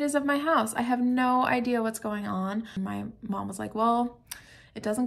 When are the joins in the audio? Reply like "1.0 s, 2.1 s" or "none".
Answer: 2.7 s